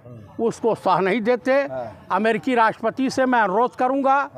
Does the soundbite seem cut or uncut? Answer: uncut